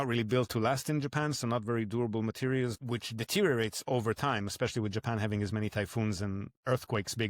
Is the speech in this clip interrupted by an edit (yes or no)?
yes